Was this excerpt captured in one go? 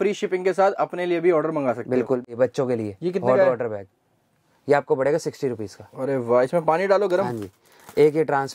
no; 1 cut; at 2.2 s

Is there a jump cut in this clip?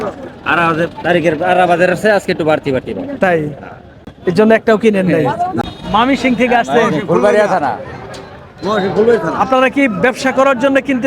yes; 1 cut; at 5.6 s

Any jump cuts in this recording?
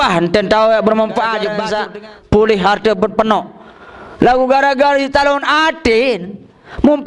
yes; 1 cut; at 1.6 s

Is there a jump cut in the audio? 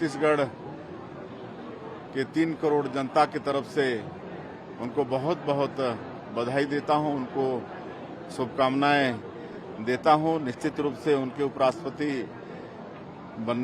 no; 0 cuts

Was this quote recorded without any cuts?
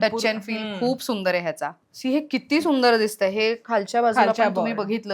no; 1 cut; at 1.9 s

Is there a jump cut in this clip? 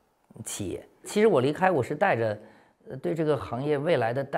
yes; 1 cut; at 1.0 s

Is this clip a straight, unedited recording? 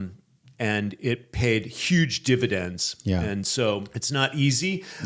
no; 1 cut; at 4.0 s

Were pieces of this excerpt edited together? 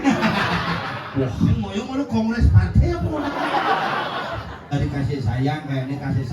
yes; 1 cut; at 4.7 s

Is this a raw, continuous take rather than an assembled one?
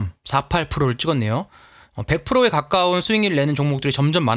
yes; 0 cuts

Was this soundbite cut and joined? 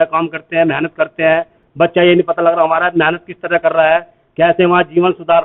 no; 0 cuts

